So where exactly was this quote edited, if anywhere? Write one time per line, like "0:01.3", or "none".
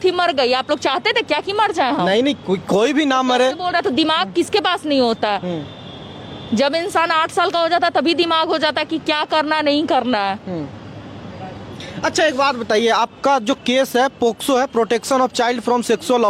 none